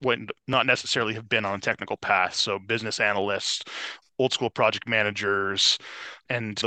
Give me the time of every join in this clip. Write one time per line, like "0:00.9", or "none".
none